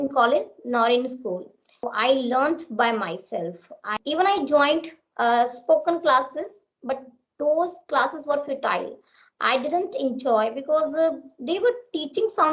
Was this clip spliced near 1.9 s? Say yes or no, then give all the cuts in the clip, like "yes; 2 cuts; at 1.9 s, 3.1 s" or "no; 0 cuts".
yes; 2 cuts; at 1.9 s, 3.9 s